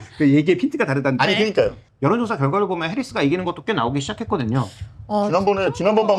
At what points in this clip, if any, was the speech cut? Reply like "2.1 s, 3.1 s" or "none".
1.8 s